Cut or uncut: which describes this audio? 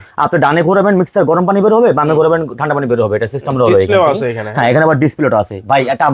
uncut